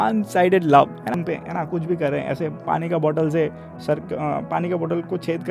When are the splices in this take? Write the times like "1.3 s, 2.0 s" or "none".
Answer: 1.1 s